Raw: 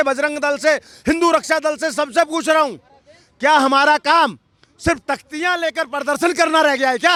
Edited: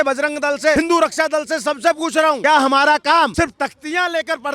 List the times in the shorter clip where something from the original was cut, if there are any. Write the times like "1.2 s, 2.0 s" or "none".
0.7 s, 2.4 s, 3.3 s